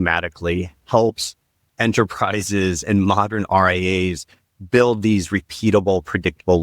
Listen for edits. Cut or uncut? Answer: uncut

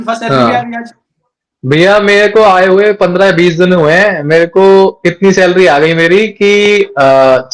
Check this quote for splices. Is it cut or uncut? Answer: uncut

